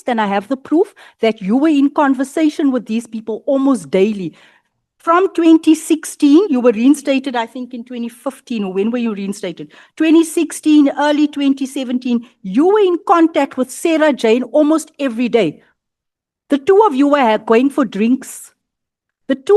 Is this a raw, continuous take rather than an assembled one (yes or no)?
yes